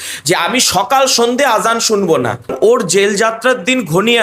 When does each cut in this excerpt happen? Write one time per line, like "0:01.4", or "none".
0:02.5